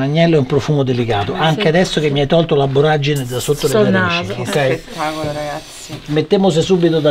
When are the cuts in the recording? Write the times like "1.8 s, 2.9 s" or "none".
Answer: none